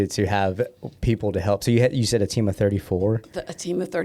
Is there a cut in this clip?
no; 0 cuts

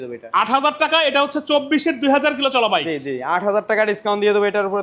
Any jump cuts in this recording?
no; 0 cuts

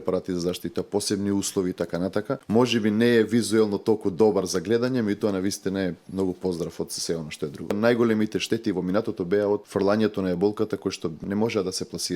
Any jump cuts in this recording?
yes; 4 cuts; at 2.4 s, 7.8 s, 9.7 s, 11.2 s

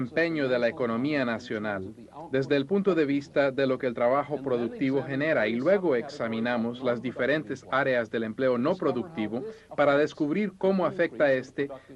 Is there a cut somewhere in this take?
yes; 1 cut; at 6.3 s

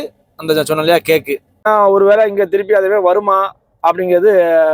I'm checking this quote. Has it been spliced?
yes; 1 cut; at 1.6 s

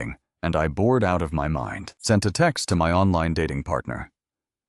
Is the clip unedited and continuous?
no; 1 cut; at 1.8 s

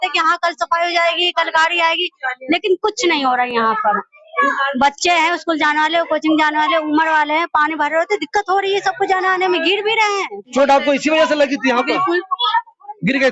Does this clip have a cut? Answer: no; 0 cuts

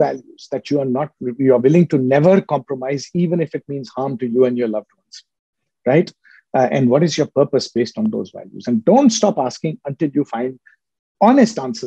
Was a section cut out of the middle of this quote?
no; 0 cuts

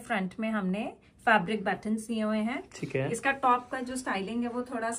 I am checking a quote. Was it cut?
no; 0 cuts

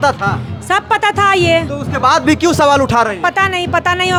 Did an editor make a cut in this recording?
no; 0 cuts

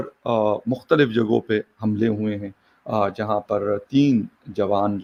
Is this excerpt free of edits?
yes; 0 cuts

